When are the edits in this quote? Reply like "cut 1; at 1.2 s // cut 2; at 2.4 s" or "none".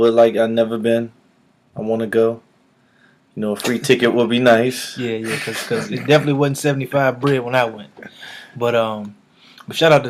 cut 1; at 8.6 s